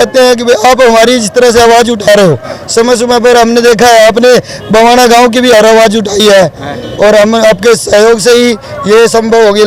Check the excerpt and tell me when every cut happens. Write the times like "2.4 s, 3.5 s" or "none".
none